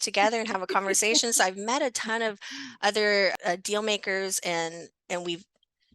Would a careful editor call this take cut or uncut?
cut